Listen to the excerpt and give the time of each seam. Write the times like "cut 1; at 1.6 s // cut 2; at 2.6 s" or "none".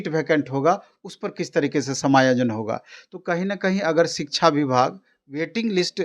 none